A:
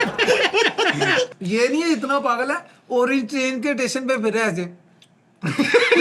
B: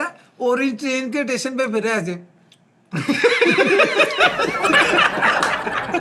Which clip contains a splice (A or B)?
A